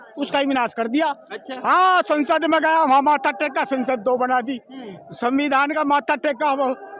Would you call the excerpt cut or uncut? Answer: uncut